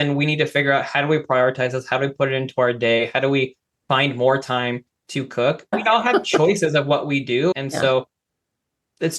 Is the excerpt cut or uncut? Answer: cut